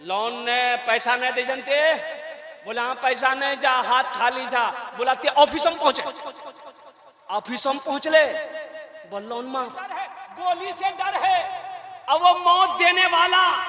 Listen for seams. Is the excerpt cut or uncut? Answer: cut